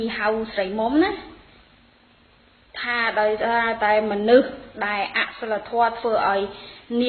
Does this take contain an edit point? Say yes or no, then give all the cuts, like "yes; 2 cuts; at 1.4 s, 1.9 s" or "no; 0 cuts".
yes; 1 cut; at 2.0 s